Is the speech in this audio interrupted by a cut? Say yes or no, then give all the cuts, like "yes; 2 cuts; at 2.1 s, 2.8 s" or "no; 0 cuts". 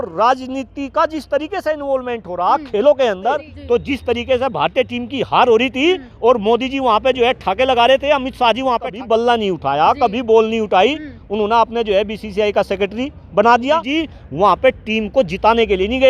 yes; 3 cuts; at 3.5 s, 8.9 s, 13.9 s